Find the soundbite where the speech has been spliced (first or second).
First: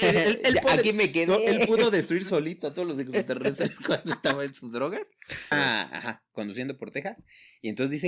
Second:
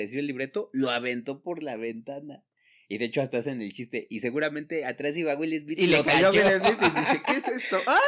first